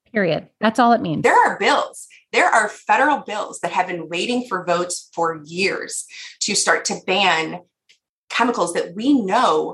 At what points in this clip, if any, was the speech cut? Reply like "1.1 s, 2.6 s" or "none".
1.2 s